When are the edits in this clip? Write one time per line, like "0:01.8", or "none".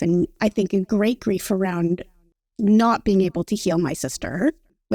none